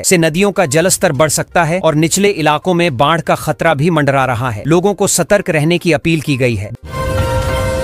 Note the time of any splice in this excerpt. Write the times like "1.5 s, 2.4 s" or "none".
6.8 s